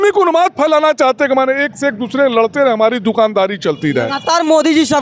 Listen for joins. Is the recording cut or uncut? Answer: uncut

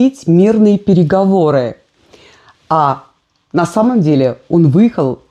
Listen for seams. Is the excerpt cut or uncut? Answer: uncut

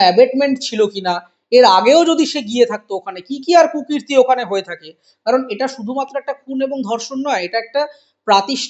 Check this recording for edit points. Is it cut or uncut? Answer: uncut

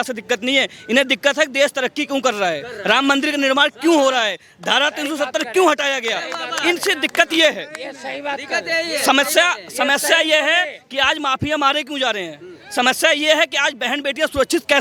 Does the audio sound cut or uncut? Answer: uncut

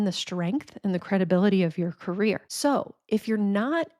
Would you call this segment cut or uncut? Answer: uncut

